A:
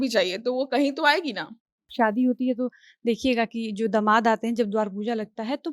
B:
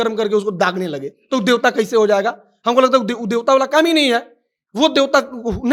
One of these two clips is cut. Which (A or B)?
A